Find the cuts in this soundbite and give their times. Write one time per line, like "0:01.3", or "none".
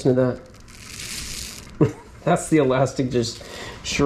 none